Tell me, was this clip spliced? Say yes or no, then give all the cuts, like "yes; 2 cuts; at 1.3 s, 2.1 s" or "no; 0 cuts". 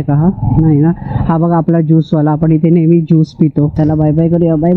yes; 1 cut; at 3.7 s